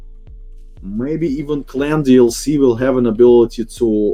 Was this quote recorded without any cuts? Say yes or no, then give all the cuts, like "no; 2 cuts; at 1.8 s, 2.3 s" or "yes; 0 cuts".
yes; 0 cuts